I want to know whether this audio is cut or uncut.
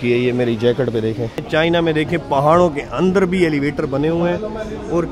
cut